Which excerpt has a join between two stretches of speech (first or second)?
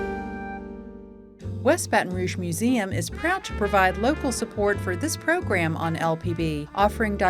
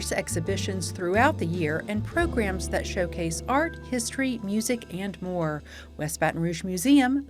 first